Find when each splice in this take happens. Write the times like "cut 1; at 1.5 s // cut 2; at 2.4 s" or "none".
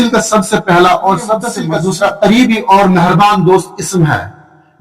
cut 1; at 1.5 s